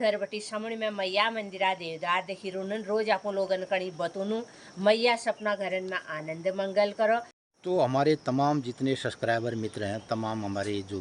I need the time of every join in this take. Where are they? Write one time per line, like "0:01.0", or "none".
0:07.4